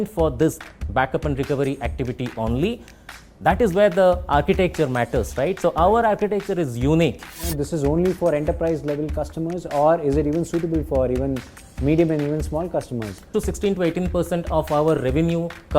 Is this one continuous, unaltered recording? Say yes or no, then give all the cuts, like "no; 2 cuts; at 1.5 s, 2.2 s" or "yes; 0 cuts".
no; 2 cuts; at 7.5 s, 13.3 s